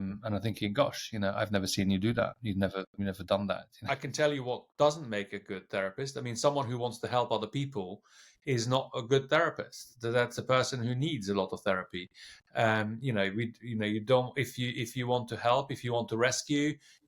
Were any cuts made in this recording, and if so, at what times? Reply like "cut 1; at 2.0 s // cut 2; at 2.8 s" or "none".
cut 1; at 3.7 s